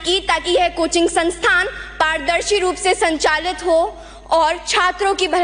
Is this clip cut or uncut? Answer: uncut